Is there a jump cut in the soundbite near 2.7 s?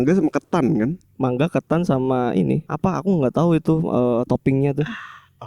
yes; 1 cut; at 2.7 s

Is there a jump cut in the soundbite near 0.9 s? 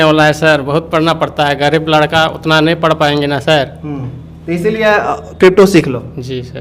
no; 0 cuts

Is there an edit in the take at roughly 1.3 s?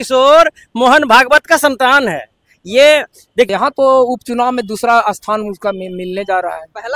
no; 1 cut; at 3.5 s

